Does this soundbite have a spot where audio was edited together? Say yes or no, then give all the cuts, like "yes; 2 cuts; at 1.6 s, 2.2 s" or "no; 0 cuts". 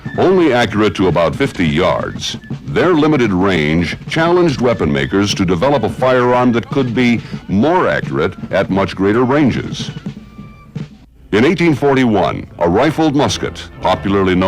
yes; 1 cut; at 12.0 s